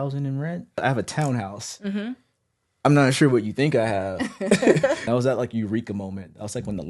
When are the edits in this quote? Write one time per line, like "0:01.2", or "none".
0:00.8
0:05.0